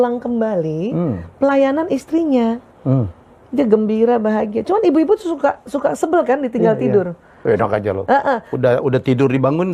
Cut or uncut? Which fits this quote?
uncut